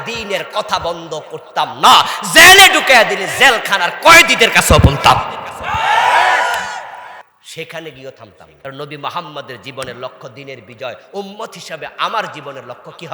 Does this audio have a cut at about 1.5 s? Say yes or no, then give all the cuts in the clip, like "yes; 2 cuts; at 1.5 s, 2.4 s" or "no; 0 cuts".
no; 1 cut; at 8.4 s